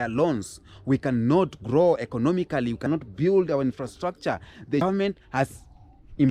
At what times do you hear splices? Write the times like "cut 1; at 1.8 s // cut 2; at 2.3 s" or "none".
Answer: cut 1; at 2.8 s // cut 2; at 4.8 s